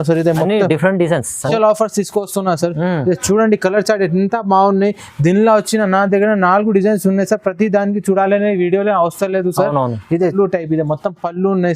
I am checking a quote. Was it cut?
yes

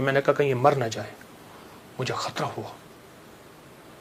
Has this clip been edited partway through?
no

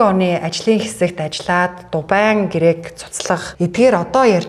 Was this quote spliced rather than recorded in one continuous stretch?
yes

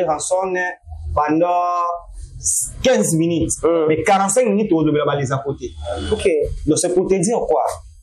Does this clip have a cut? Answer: no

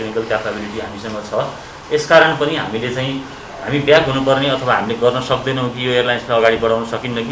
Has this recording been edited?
no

